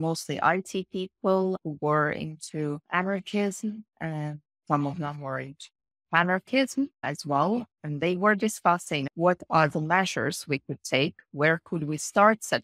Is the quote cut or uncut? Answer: cut